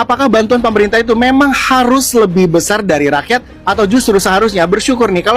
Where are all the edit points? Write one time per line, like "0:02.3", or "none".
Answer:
none